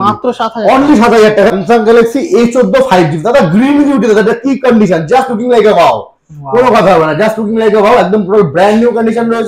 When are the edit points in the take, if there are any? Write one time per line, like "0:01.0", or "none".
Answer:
0:01.5